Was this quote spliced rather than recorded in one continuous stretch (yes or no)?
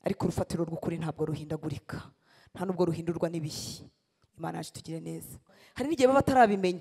yes